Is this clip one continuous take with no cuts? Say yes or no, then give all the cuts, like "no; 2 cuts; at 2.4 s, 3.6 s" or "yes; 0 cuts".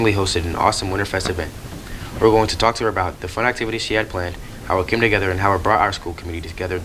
yes; 0 cuts